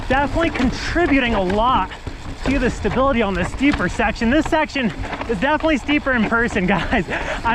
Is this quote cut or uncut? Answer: uncut